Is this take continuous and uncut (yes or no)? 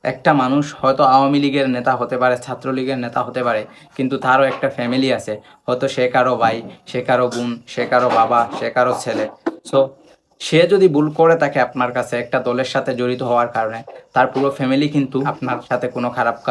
yes